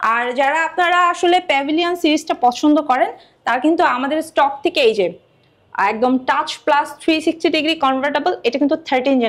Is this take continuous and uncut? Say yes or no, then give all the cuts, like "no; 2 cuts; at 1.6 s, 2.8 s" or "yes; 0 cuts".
yes; 0 cuts